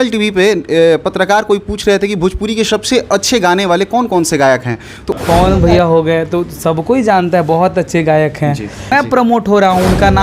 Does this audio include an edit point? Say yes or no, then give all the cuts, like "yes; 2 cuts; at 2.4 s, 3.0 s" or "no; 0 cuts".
yes; 2 cuts; at 5.0 s, 8.9 s